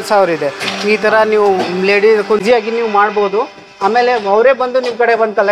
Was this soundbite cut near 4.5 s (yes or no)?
no